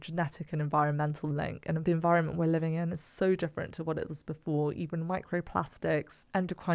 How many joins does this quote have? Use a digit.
1